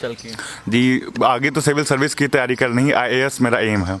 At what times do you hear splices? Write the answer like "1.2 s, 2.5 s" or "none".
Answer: none

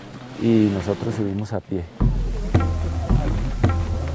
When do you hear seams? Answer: 1.1 s

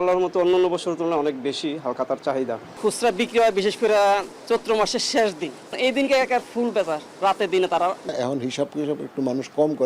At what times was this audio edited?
2.7 s, 5.8 s, 8.1 s

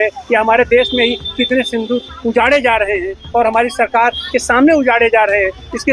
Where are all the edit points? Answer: none

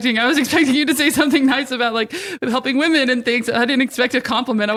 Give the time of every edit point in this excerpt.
none

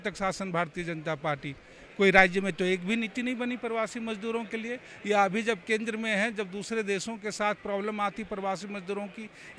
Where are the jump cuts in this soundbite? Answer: none

